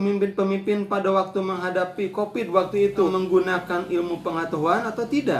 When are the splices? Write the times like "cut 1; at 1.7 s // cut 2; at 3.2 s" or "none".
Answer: cut 1; at 3.1 s